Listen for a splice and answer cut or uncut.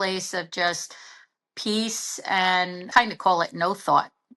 cut